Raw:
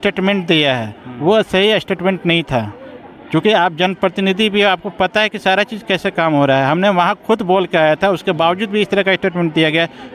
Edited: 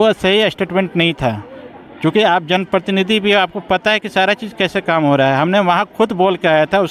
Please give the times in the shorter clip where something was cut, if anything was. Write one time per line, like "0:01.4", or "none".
none